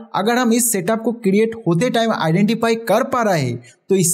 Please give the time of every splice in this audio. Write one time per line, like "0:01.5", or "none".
none